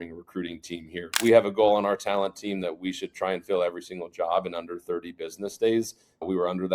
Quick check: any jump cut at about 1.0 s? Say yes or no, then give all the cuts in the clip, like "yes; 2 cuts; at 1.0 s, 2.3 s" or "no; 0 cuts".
yes; 1 cut; at 1.0 s